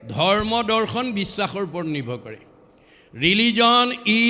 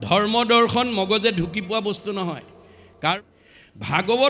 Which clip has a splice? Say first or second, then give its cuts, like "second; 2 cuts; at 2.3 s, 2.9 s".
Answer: second; 1 cut; at 3.1 s